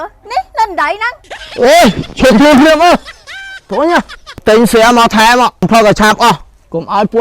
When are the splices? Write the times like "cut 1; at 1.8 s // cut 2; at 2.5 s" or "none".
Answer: cut 1; at 4.4 s // cut 2; at 5.7 s